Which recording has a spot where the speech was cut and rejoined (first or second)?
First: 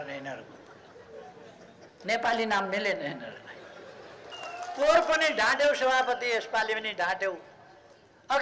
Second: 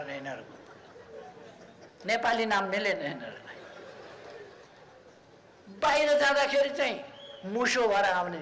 first